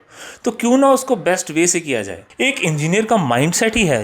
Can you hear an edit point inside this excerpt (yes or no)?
yes